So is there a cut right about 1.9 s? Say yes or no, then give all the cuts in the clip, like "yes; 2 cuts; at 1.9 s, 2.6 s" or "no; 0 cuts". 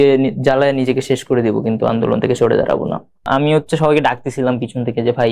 no; 1 cut; at 3.3 s